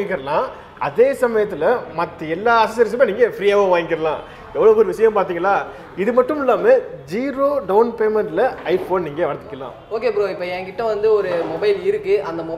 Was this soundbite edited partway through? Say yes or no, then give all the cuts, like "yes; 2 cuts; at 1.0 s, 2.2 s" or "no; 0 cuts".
yes; 1 cut; at 9.7 s